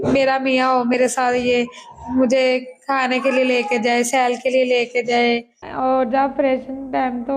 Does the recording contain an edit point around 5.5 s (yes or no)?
yes